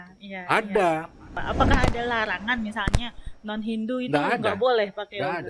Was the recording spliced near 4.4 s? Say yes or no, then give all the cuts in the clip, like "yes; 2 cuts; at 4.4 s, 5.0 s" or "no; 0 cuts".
no; 1 cut; at 1.4 s